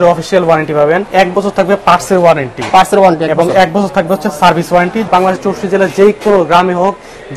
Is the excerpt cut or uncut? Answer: cut